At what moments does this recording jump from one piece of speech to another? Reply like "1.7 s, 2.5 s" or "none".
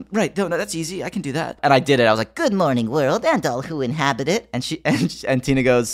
1.6 s

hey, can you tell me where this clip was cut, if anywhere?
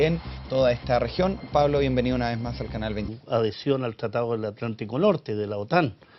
none

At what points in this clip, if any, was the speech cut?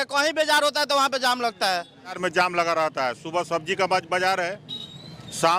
2.2 s

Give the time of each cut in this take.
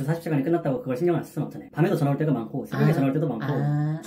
1.6 s

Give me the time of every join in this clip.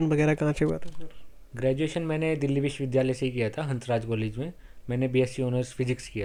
none

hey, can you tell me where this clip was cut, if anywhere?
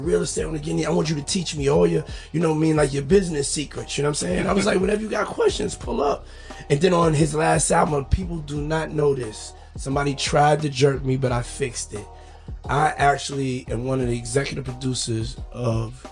none

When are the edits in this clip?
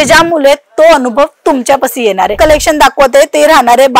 2.3 s

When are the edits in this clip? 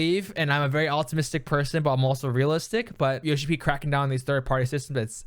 3.2 s

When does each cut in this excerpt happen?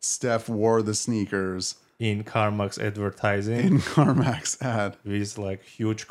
none

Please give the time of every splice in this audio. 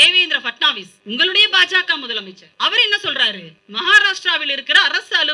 0.9 s, 2.4 s, 3.6 s

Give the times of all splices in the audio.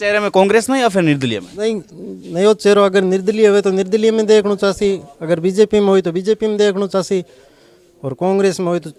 none

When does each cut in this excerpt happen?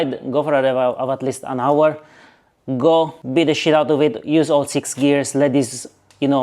3.2 s

